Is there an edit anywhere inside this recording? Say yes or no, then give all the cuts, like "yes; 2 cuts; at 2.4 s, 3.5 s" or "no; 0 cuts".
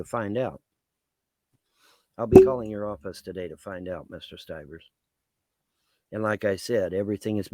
no; 0 cuts